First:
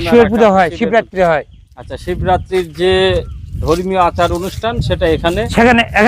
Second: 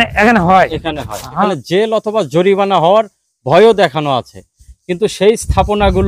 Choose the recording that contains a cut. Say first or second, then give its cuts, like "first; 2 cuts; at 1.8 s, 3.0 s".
second; 1 cut; at 1.5 s